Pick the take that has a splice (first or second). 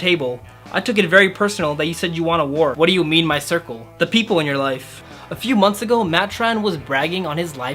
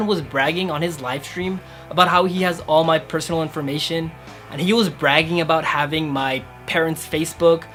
first